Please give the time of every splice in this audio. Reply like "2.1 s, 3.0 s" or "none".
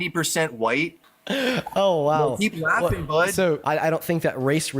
1.0 s, 3.6 s